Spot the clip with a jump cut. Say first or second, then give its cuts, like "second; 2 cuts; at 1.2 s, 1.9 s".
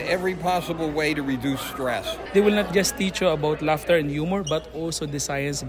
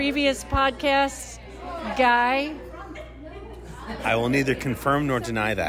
first; 1 cut; at 2.2 s